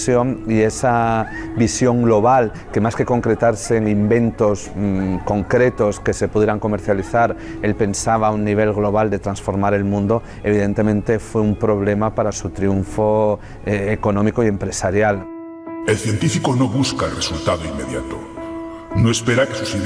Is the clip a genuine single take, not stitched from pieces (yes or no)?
no